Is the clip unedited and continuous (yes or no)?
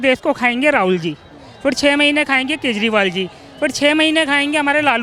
yes